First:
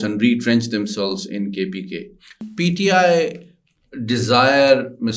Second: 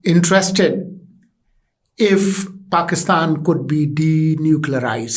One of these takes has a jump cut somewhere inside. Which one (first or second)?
first